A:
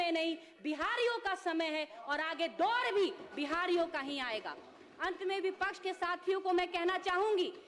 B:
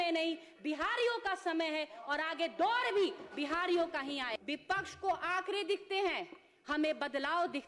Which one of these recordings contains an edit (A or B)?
B